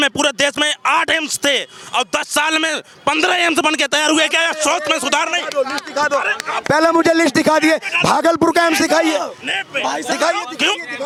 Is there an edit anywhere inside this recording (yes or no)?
no